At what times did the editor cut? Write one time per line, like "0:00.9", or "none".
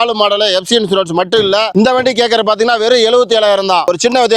0:01.7

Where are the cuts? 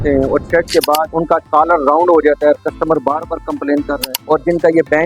0:01.1
0:04.1

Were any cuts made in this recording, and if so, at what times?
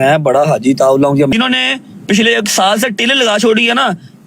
0:01.3

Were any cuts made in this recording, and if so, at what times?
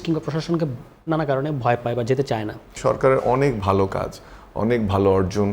0:02.7

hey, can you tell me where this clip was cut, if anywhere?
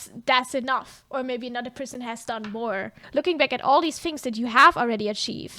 0:03.0

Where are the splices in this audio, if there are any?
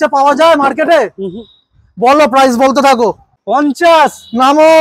0:03.4

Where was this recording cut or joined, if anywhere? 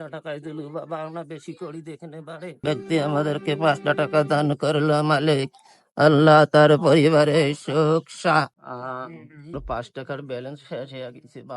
0:02.6
0:09.6

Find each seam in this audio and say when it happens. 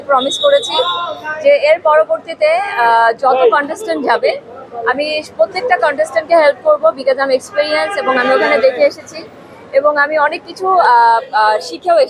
none

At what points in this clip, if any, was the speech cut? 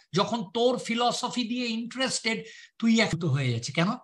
0:03.1

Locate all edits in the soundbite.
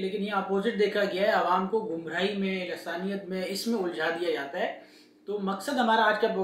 none

